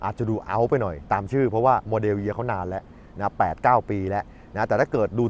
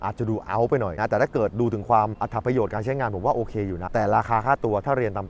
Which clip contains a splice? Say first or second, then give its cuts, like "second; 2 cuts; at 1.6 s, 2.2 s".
second; 3 cuts; at 0.9 s, 2.2 s, 3.8 s